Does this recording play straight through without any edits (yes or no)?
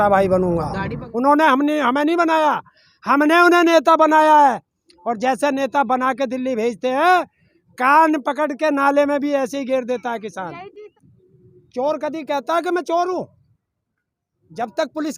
no